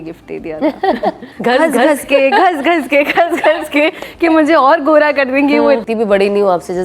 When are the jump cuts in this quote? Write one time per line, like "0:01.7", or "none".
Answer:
0:01.3
0:05.8